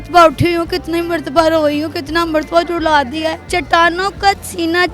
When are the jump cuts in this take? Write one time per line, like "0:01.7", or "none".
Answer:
0:03.4